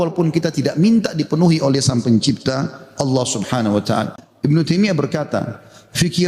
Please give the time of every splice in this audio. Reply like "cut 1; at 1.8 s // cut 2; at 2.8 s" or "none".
cut 1; at 4.5 s